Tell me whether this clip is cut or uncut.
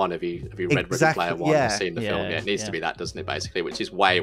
uncut